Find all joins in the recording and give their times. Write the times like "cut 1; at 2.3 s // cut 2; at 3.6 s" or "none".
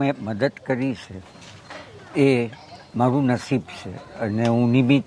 none